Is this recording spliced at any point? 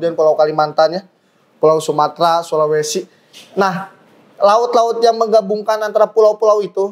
no; 0 cuts

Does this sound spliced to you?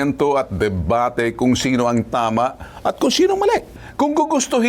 no; 0 cuts

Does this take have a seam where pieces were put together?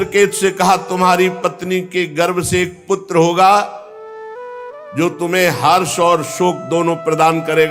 no; 0 cuts

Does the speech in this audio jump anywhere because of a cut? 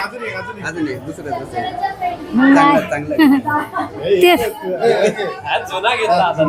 no; 0 cuts

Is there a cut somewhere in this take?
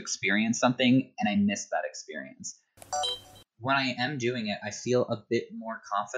yes; 1 cut; at 3.0 s

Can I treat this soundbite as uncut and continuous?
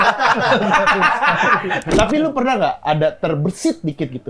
no; 1 cut; at 1.9 s

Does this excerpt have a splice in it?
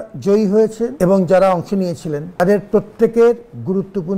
yes; 2 cuts; at 0.9 s, 2.4 s

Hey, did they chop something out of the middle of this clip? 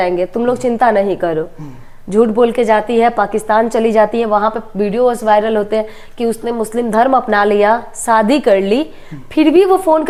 no; 0 cuts

